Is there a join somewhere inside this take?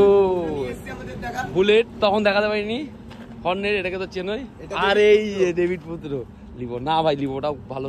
no; 0 cuts

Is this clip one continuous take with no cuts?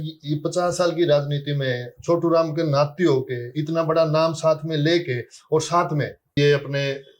no; 1 cut; at 6.2 s

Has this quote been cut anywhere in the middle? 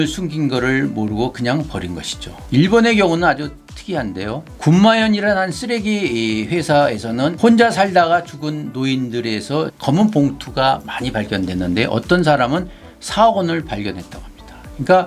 yes; 1 cut; at 9.8 s

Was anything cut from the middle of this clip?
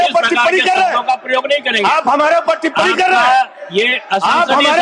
no; 0 cuts

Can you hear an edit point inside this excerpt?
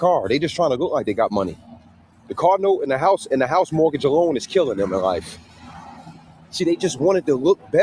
no; 0 cuts

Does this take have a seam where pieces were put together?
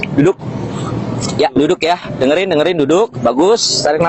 no; 0 cuts

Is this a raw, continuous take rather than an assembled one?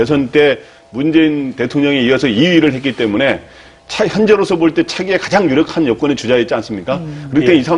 yes; 0 cuts

